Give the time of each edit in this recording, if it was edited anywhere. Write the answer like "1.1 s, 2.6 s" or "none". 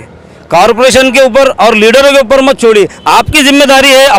none